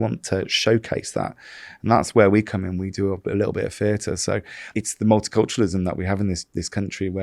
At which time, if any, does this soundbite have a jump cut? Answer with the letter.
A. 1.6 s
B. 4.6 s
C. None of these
B